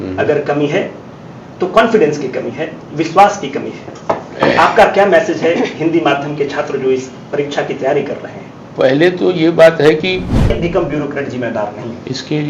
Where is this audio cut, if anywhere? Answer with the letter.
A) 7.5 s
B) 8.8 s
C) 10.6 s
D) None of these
C